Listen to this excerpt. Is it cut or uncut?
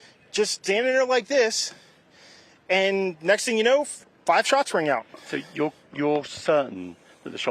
uncut